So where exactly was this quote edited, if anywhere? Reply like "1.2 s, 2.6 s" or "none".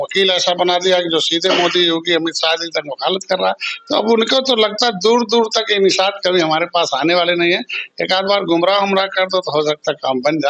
none